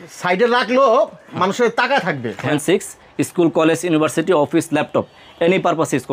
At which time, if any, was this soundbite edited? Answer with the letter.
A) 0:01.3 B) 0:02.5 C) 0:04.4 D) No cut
B